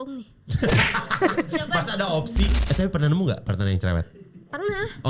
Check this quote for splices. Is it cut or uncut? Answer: cut